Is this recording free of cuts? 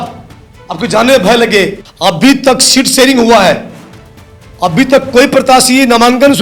no; 1 cut; at 1.8 s

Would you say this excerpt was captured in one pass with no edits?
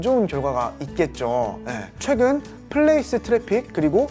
no; 1 cut; at 1.9 s

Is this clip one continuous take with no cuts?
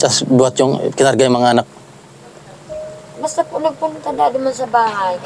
yes; 0 cuts

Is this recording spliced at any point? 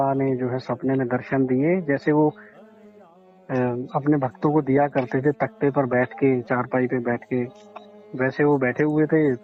no; 0 cuts

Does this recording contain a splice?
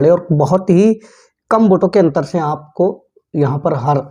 no; 0 cuts

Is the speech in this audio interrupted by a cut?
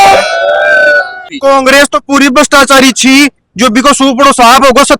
yes; 1 cut; at 1.2 s

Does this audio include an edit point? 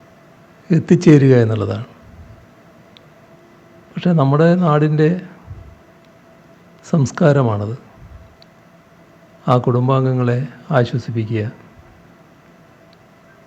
yes; 1 cut; at 3.3 s

